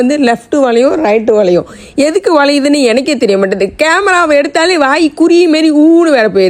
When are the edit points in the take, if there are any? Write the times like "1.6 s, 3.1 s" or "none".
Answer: none